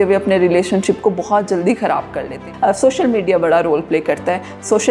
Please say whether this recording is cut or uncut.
cut